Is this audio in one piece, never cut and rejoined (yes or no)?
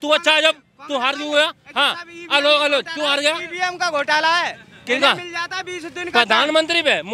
yes